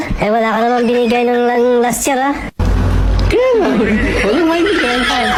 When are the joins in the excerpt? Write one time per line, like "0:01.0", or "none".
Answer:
none